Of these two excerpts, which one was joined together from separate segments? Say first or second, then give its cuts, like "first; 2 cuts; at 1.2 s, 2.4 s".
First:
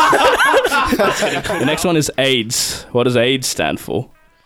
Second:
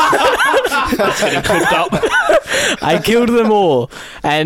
first; 1 cut; at 1.5 s